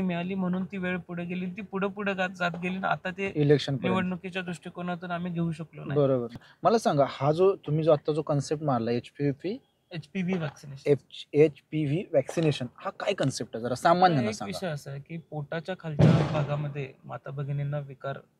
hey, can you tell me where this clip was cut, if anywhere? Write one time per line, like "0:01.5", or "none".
0:06.5